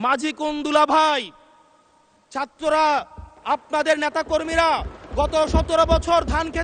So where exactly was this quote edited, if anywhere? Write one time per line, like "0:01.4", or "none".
none

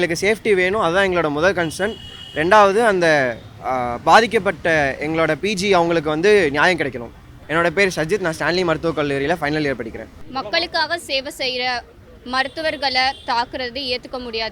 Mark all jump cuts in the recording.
none

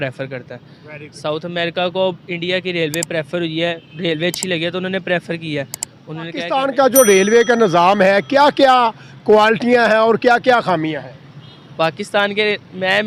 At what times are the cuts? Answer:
0:06.5

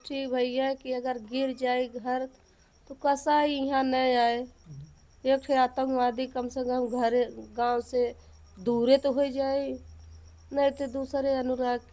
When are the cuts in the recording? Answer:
none

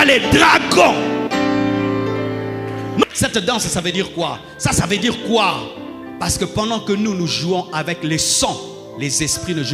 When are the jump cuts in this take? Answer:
0:03.0

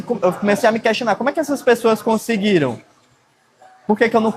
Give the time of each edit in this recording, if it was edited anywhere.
none

